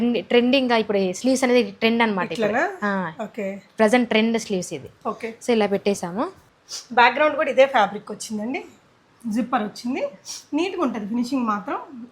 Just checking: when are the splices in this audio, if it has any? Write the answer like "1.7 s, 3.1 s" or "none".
none